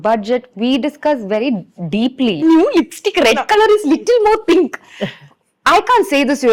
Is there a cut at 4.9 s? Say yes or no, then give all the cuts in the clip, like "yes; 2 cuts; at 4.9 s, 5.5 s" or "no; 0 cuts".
no; 1 cut; at 2.4 s